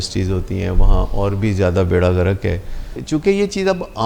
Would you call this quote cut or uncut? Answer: cut